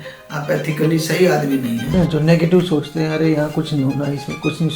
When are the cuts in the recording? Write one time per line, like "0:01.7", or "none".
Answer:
0:01.9